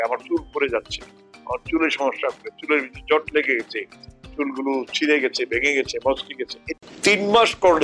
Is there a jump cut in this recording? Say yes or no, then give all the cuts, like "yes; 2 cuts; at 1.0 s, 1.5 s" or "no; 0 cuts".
yes; 1 cut; at 6.8 s